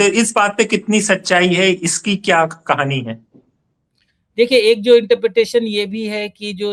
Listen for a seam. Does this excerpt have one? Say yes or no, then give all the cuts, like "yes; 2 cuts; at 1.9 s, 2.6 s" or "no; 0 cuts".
no; 0 cuts